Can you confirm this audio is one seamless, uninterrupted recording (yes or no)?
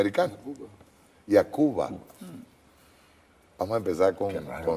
no